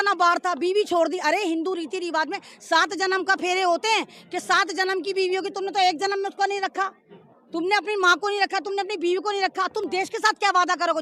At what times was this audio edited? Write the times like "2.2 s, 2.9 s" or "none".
none